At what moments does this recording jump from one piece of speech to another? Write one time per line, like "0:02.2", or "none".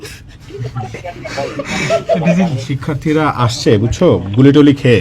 0:02.7